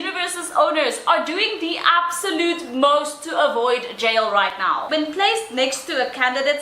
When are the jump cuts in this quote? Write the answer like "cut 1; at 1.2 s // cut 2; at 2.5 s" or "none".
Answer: cut 1; at 4.8 s